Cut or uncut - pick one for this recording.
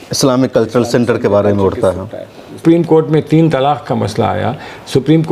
cut